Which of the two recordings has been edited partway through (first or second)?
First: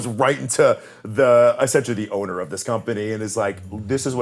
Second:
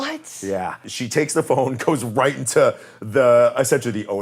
second